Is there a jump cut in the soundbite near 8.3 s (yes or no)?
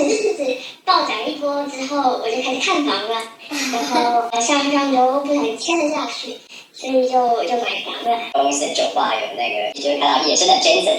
yes